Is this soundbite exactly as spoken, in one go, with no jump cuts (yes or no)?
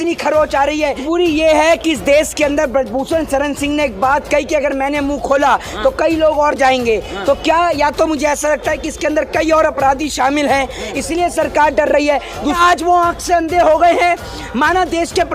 no